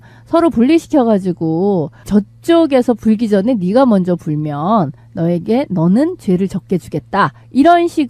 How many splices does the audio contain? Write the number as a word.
one